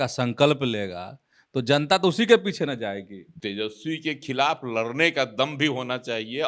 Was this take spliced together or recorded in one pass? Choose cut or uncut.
cut